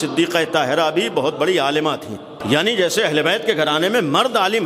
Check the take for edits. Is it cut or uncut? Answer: cut